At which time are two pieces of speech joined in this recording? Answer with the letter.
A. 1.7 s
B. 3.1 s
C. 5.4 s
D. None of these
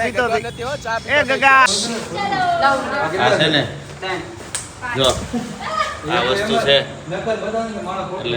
A